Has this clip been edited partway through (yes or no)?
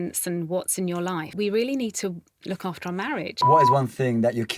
yes